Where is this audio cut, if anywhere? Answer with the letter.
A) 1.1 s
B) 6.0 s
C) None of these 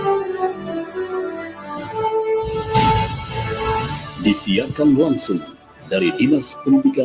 B